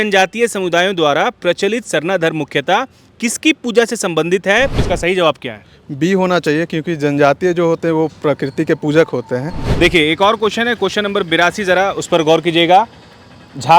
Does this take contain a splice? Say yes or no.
yes